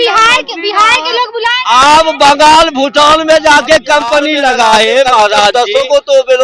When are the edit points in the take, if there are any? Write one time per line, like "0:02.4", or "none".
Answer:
0:05.5